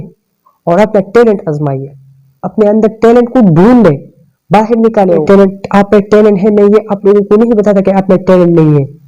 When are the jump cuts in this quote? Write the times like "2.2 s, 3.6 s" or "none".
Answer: 5.2 s

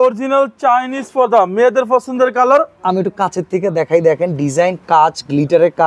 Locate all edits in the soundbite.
none

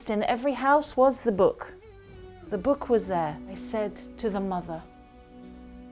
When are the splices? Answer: 3.5 s

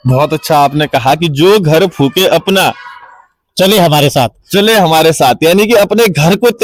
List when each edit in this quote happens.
none

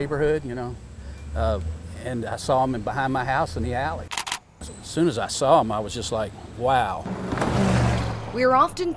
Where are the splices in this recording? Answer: 7.1 s

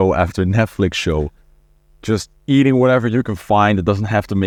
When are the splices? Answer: none

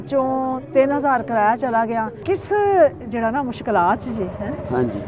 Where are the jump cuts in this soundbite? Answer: 2.1 s

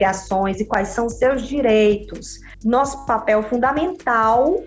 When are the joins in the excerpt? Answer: 2.5 s

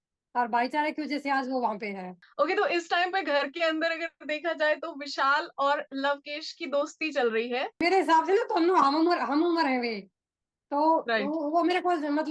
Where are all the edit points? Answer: 2.2 s, 7.8 s

